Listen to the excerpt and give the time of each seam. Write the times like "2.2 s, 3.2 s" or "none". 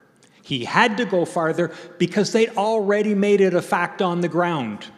none